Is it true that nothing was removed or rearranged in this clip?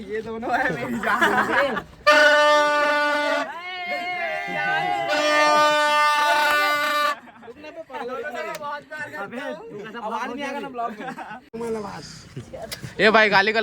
no; 2 cuts; at 5.8 s, 11.5 s

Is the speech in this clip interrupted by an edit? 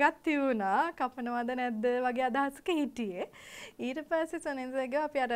no; 0 cuts

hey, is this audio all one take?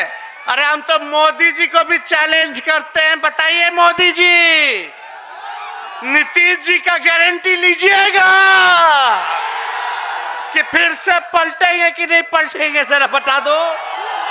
yes; 0 cuts

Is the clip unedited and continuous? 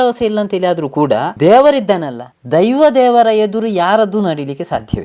no; 1 cut; at 1.3 s

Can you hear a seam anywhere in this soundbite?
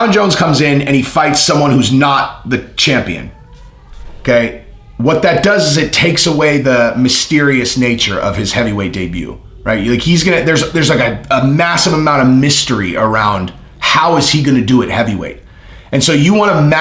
no; 0 cuts

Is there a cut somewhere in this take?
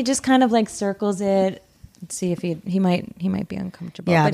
no; 0 cuts

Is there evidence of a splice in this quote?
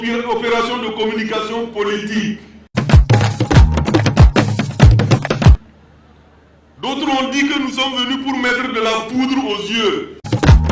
no; 0 cuts

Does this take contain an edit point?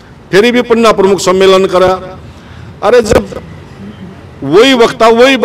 no; 0 cuts

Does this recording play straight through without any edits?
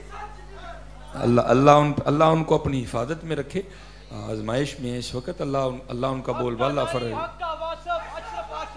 yes; 0 cuts

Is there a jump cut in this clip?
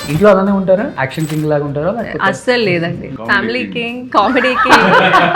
yes; 2 cuts; at 1.0 s, 3.1 s

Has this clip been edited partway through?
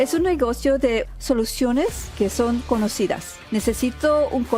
yes; 3 cuts; at 1.0 s, 2.1 s, 3.4 s

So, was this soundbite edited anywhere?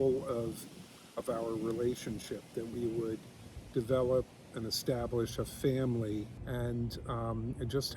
yes; 1 cut; at 6.4 s

